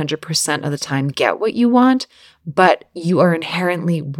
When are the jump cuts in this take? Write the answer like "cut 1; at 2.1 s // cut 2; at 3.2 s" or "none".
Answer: none